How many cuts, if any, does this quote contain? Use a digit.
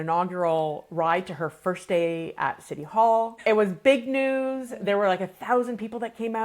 1